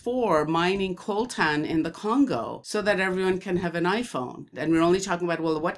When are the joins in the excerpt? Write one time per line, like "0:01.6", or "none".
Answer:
0:04.5